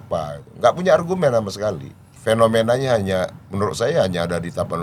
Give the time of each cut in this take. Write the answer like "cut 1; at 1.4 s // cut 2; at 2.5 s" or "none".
cut 1; at 2.1 s